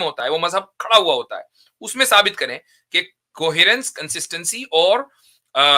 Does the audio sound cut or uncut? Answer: uncut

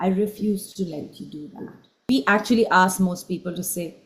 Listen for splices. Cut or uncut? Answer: cut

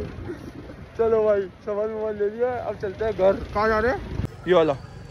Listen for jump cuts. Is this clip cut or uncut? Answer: cut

